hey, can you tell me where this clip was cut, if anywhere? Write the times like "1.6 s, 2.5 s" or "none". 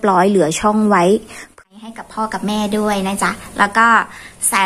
1.6 s